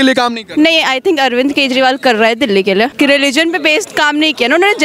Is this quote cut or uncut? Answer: cut